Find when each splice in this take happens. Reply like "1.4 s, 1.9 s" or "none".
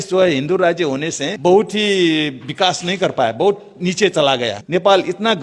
1.2 s, 4.6 s